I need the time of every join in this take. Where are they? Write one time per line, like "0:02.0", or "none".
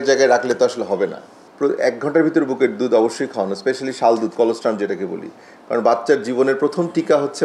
none